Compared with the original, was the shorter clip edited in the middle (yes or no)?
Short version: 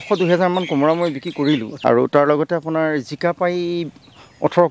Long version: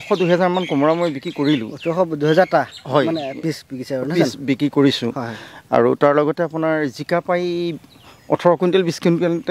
yes